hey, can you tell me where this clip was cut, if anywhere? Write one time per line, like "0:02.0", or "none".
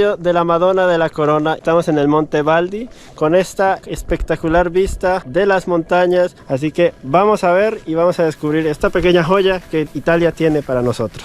0:01.6
0:06.4